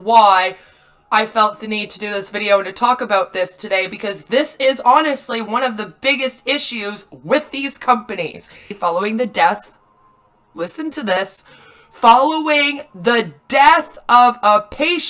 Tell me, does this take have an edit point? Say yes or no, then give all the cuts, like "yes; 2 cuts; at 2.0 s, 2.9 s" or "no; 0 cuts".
yes; 1 cut; at 8.7 s